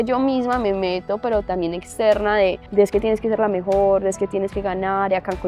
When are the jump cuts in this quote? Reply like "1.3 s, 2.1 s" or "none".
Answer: 2.6 s